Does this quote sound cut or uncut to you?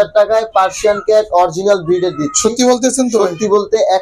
uncut